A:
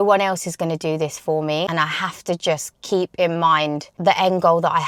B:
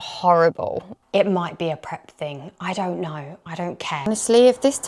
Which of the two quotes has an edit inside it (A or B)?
B